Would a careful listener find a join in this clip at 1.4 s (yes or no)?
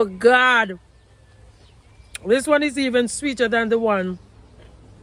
no